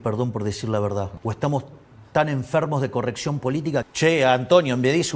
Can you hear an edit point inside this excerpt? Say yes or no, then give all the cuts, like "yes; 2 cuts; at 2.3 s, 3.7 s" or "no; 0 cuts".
yes; 2 cuts; at 1.1 s, 3.9 s